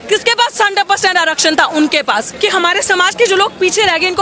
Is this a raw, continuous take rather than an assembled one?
no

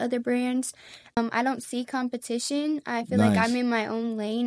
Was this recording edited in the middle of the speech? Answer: yes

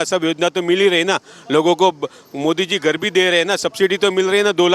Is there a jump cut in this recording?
no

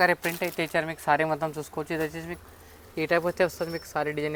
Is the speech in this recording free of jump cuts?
yes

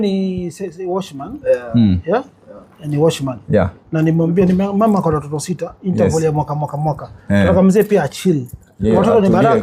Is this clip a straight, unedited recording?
yes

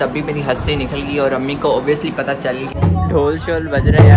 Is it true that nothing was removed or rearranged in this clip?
no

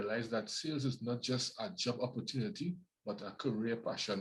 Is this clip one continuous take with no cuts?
yes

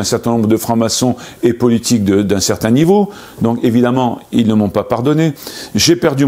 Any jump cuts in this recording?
no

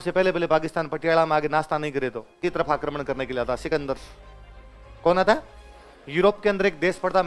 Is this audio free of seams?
no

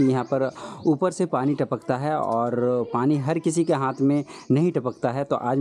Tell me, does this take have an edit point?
no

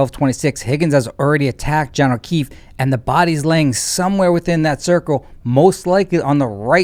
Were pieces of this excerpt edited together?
no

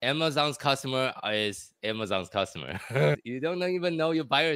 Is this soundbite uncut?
no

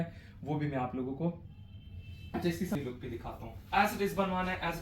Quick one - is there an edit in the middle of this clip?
yes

